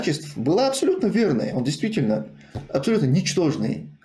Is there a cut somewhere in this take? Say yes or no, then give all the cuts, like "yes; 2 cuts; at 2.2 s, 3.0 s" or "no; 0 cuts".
no; 0 cuts